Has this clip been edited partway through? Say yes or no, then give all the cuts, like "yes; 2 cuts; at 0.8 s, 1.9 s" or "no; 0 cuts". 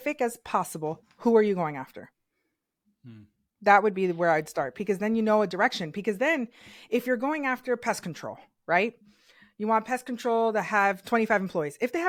no; 0 cuts